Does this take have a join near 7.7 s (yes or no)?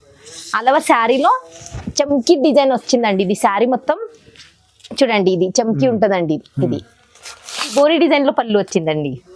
yes